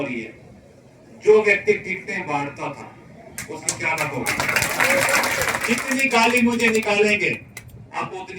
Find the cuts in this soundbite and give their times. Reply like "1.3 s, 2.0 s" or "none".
5.6 s